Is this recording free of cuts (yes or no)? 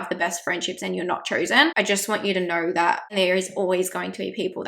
no